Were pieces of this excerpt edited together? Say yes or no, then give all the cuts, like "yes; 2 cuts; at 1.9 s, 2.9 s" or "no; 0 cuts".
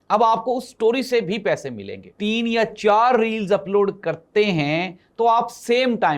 yes; 1 cut; at 2.2 s